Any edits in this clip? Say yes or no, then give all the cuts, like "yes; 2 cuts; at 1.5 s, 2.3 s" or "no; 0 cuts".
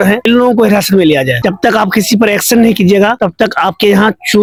no; 0 cuts